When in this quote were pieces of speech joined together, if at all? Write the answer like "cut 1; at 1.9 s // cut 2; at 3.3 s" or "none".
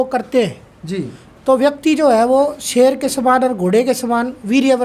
none